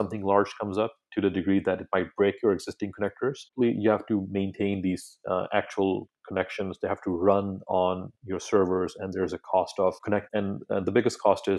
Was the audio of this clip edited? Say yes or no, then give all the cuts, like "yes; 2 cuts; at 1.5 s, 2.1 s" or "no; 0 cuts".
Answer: no; 0 cuts